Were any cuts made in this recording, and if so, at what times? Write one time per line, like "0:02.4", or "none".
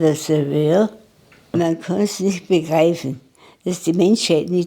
0:01.5